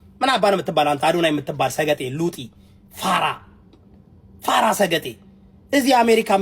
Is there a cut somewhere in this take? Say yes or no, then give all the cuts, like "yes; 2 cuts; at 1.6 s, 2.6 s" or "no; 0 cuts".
no; 0 cuts